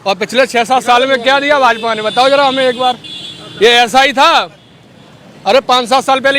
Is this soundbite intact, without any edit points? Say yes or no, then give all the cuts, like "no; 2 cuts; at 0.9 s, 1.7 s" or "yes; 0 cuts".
yes; 0 cuts